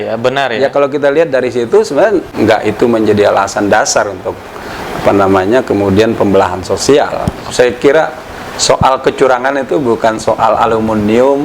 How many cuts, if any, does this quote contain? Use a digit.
2